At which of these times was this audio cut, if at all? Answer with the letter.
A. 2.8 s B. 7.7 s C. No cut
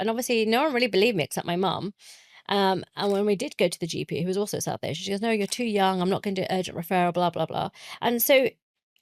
C